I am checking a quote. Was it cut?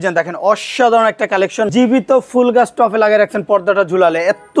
yes; 1 cut; at 1.7 s

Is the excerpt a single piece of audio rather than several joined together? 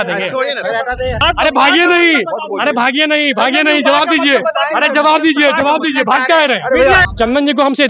no; 2 cuts; at 1.2 s, 7.1 s

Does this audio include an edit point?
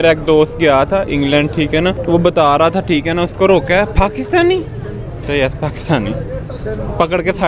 no; 0 cuts

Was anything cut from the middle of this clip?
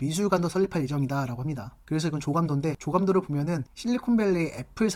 no; 0 cuts

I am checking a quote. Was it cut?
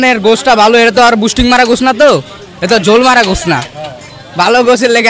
no; 0 cuts

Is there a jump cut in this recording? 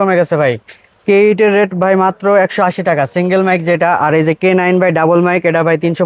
no; 0 cuts

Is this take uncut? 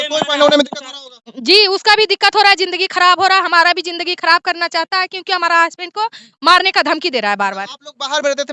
yes; 0 cuts

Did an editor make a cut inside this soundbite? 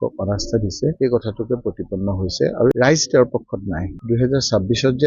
yes; 2 cuts; at 2.7 s, 4.0 s

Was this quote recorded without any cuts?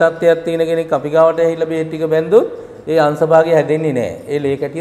yes; 0 cuts

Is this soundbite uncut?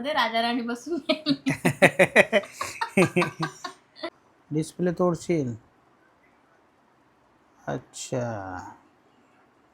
no; 1 cut; at 4.0 s

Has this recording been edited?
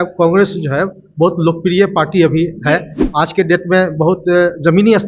no; 0 cuts

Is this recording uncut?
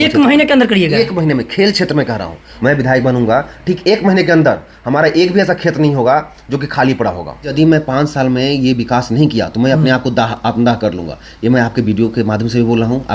no; 2 cuts; at 2.5 s, 7.5 s

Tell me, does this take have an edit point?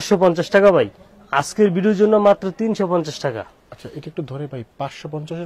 no; 0 cuts

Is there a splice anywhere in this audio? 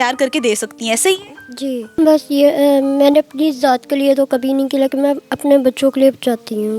yes; 1 cut; at 1.9 s

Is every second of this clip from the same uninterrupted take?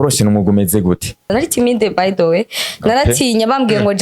no; 1 cut; at 1.3 s

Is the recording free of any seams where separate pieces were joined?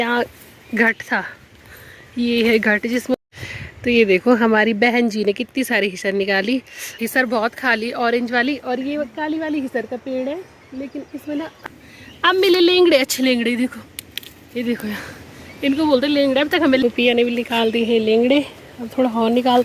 no; 4 cuts; at 3.1 s, 6.8 s, 11.5 s, 16.8 s

